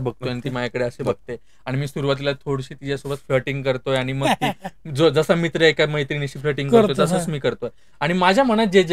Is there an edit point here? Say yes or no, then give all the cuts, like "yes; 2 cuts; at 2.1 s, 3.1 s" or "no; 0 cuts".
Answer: no; 0 cuts